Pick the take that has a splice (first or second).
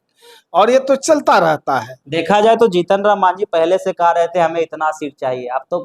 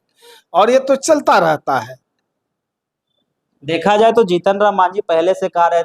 first